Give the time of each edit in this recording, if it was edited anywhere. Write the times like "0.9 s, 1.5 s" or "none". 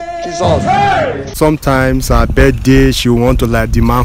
1.3 s